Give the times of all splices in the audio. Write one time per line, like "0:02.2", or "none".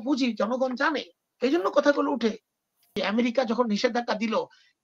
0:03.0